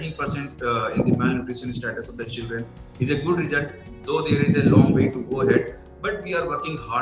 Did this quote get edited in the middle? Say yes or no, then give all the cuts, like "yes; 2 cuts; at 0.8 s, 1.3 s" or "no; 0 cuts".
no; 0 cuts